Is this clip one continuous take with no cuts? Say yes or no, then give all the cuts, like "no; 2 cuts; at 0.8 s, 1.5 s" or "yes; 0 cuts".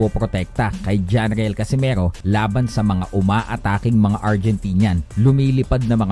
no; 2 cuts; at 2.2 s, 5.1 s